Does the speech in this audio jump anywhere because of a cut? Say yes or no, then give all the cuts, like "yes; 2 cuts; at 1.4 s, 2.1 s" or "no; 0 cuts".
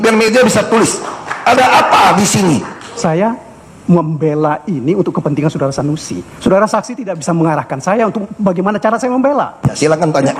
yes; 1 cut; at 2.9 s